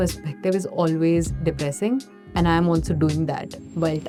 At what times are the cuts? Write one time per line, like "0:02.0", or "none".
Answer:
none